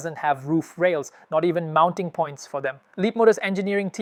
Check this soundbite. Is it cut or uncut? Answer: uncut